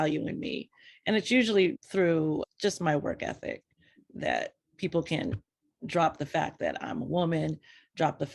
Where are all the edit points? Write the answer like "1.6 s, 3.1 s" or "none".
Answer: 1.8 s